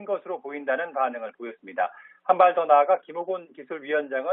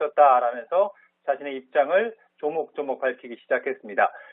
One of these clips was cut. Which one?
second; 1 cut; at 2.3 s

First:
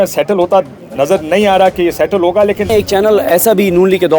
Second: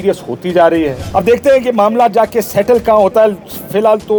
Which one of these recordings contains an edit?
first; 1 cut; at 2.7 s

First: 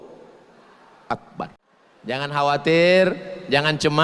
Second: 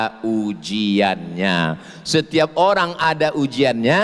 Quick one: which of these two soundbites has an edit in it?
first; 1 cut; at 2.2 s

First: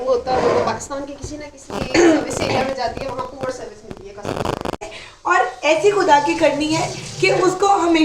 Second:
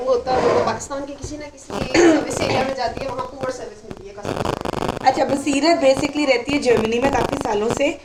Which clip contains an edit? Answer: first; 1 cut; at 4.8 s

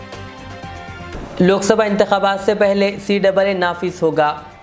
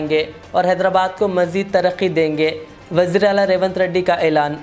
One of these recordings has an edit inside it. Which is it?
first; 1 cut; at 1.1 s

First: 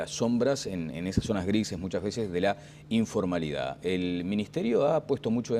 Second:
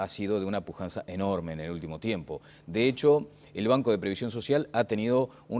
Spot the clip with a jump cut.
first; 1 cut; at 4.5 s

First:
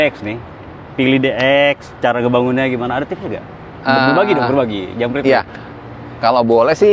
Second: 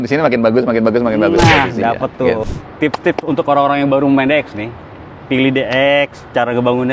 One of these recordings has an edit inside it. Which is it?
second; 1 cut; at 2.5 s

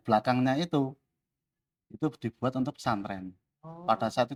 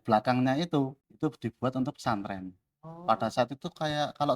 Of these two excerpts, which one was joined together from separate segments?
second; 1 cut; at 1.0 s

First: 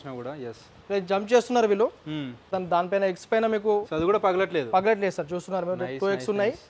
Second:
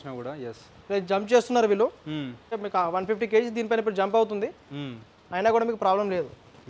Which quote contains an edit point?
first; 1 cut; at 2.4 s

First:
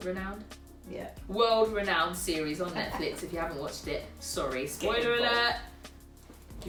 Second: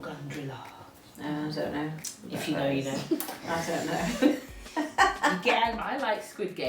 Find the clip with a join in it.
second; 1 cut; at 5.8 s

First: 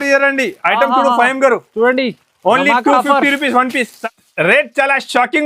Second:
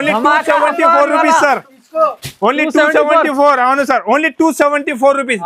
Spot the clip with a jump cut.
first; 1 cut; at 3.9 s

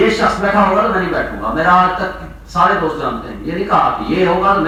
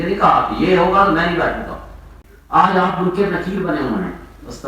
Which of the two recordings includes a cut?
second; 1 cut; at 2.2 s

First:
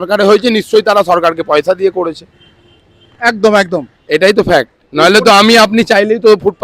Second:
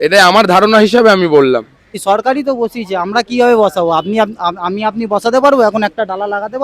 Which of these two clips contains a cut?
second; 1 cut; at 2.0 s

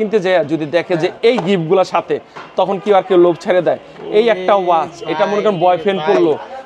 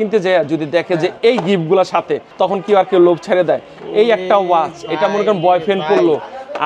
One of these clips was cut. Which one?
second; 1 cut; at 2.2 s

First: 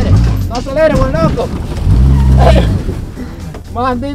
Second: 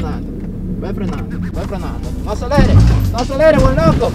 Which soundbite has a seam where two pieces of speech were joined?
second; 1 cut; at 1.5 s

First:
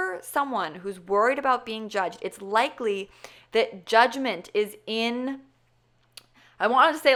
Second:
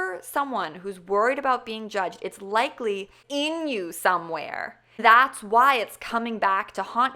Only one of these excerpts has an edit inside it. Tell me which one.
second; 2 cuts; at 3.2 s, 4.9 s

